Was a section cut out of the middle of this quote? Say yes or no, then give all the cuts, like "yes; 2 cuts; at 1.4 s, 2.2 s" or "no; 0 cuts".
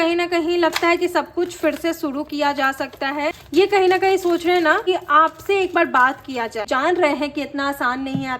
yes; 3 cuts; at 3.4 s, 4.9 s, 6.6 s